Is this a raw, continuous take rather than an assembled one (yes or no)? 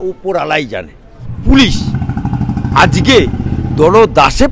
no